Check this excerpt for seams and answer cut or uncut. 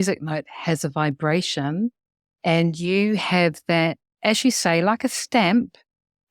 uncut